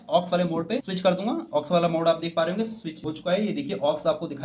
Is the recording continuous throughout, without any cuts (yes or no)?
yes